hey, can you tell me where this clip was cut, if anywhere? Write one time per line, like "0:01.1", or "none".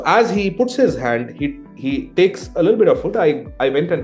none